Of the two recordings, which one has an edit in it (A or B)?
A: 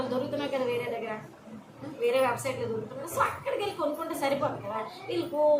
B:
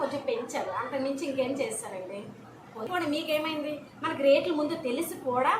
B